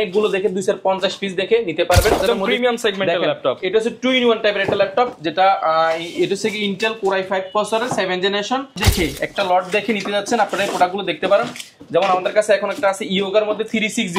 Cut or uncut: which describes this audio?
cut